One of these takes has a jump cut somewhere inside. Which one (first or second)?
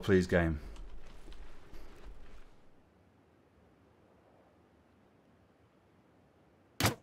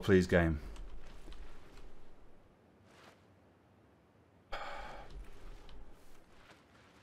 first